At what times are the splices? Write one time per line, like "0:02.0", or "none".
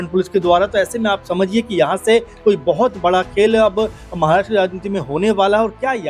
none